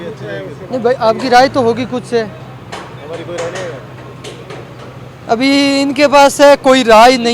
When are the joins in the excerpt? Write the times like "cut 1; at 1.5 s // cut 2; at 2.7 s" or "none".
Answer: none